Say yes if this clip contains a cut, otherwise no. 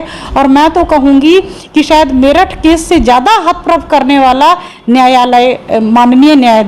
no